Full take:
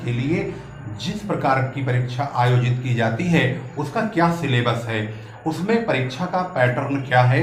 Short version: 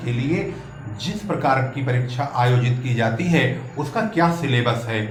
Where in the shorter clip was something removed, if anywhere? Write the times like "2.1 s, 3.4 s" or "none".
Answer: none